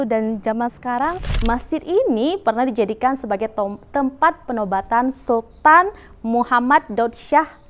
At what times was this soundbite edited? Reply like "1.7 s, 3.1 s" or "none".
1.3 s